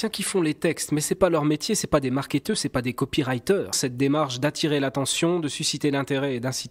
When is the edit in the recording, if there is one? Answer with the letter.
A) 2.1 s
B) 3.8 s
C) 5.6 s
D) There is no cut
B